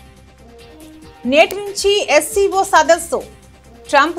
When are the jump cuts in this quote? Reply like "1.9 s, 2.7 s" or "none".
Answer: 1.2 s